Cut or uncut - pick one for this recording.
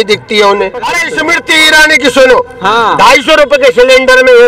cut